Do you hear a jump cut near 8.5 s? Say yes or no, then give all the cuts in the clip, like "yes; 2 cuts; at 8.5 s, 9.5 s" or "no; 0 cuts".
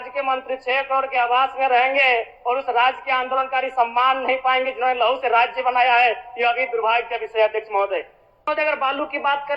yes; 1 cut; at 8.5 s